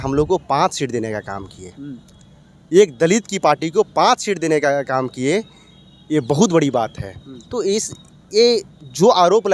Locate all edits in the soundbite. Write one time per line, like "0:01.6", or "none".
none